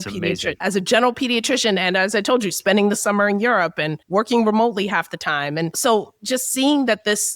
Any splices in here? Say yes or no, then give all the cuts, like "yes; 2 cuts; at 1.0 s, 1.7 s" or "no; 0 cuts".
yes; 1 cut; at 5.8 s